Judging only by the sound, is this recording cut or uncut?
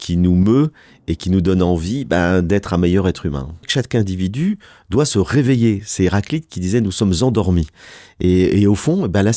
cut